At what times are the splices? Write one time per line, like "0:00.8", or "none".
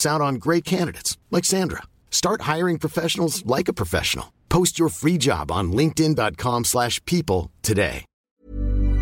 0:08.1